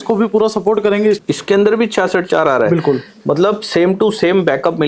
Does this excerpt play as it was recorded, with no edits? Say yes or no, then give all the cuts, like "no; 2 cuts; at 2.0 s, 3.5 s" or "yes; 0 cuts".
no; 1 cut; at 1.2 s